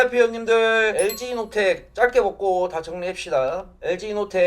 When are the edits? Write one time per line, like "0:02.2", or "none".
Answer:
0:01.0